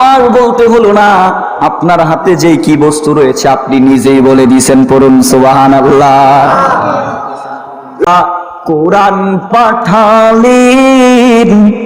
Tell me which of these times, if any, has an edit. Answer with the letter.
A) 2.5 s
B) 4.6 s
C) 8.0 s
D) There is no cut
C